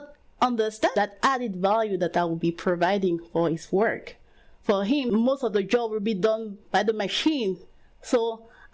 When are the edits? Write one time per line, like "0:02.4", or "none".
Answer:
0:00.9
0:05.1